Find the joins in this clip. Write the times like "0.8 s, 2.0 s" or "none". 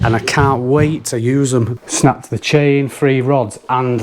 1.7 s